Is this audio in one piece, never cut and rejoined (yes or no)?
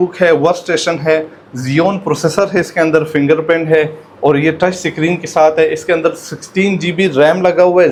yes